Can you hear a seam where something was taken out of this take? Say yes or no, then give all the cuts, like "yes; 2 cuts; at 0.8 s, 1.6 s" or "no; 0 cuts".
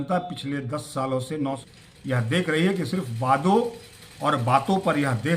yes; 1 cut; at 1.6 s